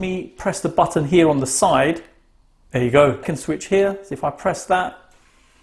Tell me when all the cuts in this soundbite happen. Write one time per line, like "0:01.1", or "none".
0:03.3